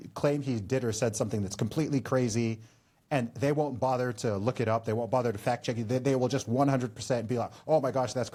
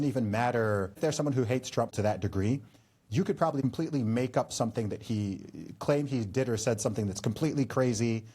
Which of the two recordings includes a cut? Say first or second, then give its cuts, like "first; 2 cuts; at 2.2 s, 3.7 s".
second; 3 cuts; at 1.0 s, 1.9 s, 3.6 s